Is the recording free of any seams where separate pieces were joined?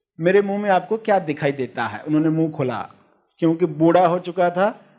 yes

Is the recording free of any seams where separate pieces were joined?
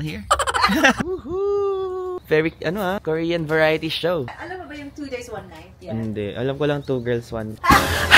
no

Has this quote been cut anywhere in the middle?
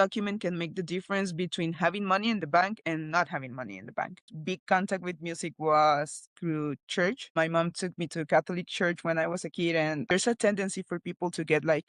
yes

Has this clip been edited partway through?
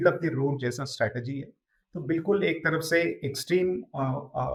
no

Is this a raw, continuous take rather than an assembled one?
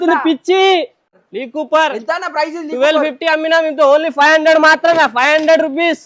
no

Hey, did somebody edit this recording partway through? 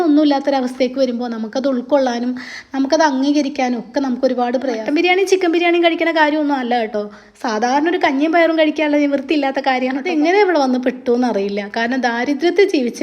yes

